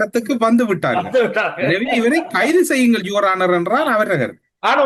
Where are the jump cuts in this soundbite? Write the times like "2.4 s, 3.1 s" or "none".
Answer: none